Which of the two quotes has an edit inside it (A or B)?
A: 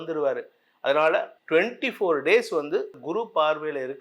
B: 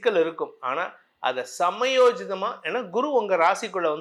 A